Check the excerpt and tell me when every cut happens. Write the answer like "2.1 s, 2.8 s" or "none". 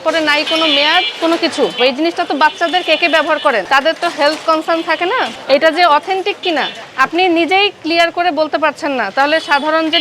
1.8 s, 3.7 s, 5.3 s, 6.8 s